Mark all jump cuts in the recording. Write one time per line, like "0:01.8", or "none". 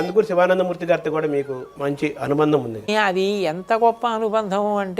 0:01.6
0:02.9